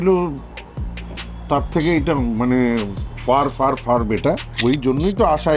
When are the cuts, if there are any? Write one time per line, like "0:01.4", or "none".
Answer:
0:04.6